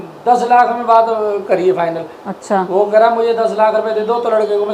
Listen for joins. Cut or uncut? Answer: uncut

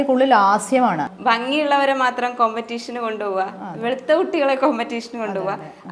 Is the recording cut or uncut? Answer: cut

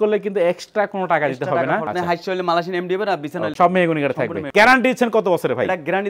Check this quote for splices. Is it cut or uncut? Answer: cut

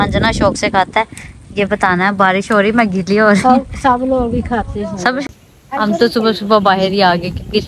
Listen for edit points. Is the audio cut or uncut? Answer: cut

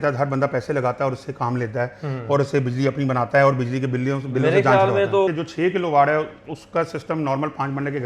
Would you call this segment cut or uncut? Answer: cut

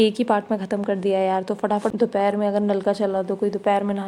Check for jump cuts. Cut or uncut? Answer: cut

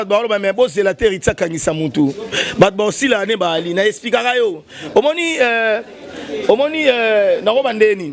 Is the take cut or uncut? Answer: uncut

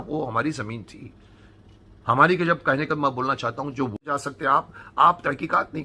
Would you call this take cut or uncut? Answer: cut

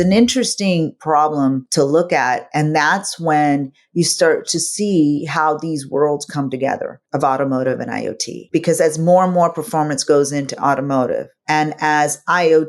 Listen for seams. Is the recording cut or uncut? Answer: cut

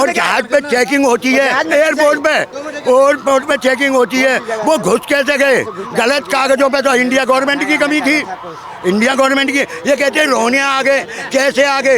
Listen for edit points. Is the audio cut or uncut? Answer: uncut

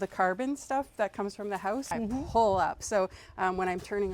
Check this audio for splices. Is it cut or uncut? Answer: cut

